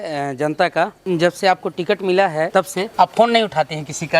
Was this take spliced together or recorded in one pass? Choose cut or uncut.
cut